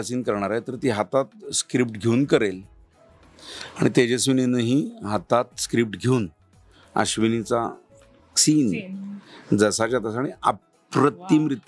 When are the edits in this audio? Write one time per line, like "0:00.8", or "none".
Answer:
none

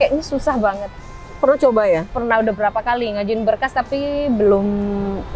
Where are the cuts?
none

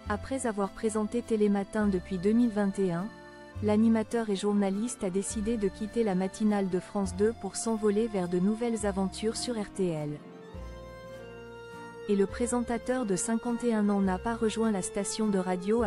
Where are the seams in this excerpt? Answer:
none

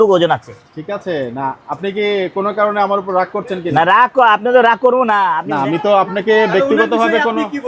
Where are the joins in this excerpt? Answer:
0:05.4

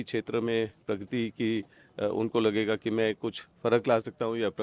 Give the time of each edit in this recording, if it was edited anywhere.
none

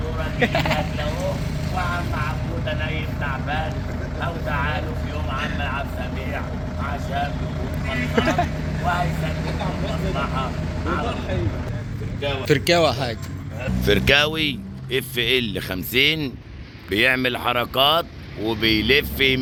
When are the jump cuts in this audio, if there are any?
none

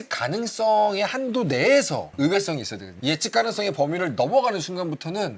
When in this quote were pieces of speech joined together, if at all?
none

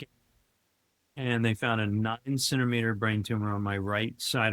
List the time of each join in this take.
none

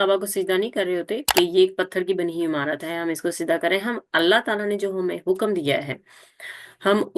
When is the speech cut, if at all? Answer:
0:01.2

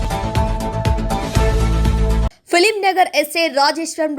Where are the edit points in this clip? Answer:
0:02.2

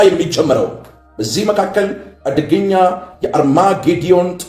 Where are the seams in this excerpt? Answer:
none

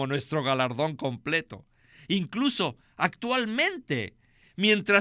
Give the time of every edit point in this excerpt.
0:01.8

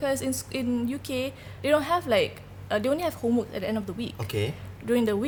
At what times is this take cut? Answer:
none

